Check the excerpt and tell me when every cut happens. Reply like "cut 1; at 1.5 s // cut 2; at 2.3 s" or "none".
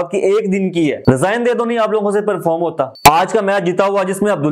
cut 1; at 1.0 s // cut 2; at 2.9 s